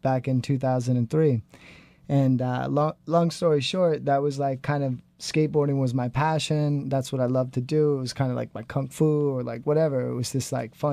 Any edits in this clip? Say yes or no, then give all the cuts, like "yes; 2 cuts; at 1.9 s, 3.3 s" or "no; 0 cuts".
yes; 1 cut; at 8.9 s